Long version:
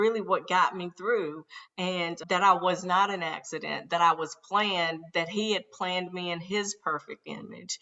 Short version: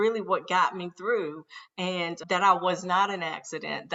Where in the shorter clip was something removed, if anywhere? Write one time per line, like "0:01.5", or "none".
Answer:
none